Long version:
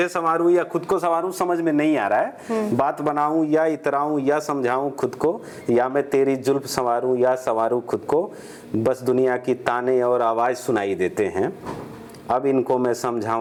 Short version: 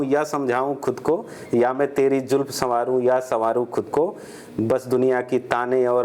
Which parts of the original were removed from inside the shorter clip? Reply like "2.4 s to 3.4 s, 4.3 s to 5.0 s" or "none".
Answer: none